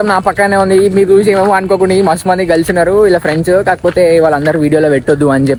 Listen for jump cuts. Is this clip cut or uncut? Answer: uncut